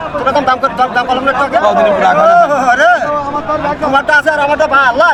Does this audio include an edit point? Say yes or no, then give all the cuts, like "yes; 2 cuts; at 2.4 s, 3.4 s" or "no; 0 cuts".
no; 0 cuts